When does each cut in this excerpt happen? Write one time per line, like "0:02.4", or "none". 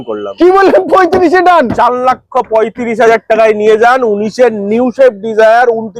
none